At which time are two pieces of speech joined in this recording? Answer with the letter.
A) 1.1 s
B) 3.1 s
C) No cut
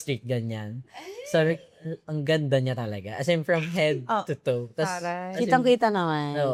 C